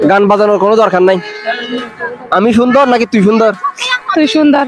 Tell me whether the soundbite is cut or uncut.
uncut